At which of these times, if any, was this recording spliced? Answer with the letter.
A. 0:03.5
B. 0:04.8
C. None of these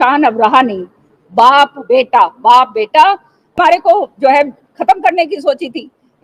A